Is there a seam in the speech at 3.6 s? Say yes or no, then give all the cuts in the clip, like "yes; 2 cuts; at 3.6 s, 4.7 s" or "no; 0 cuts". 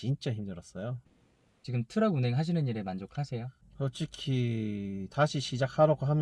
no; 1 cut; at 1.2 s